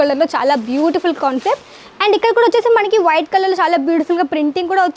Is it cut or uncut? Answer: uncut